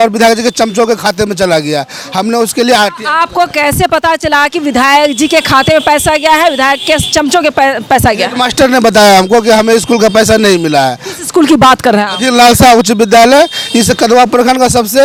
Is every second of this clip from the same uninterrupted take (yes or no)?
yes